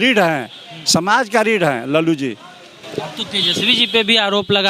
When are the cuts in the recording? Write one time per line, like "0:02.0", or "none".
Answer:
none